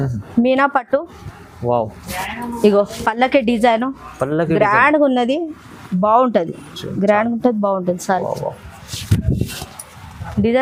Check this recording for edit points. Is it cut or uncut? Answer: uncut